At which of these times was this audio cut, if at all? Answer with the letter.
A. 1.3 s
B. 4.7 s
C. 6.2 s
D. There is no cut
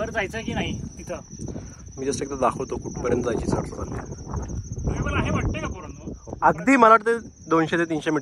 C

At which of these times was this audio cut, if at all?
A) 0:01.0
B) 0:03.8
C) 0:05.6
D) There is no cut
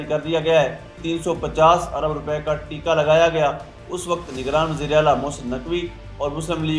A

